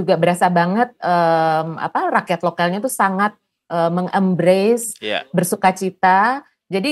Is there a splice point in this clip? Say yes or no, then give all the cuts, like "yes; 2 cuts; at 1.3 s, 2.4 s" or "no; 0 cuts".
no; 0 cuts